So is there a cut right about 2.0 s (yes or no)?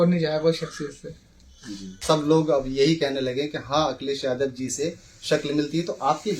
yes